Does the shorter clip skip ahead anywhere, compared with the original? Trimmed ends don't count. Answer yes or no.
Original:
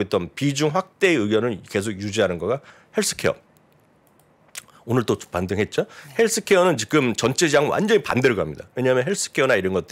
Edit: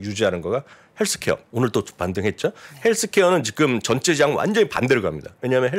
yes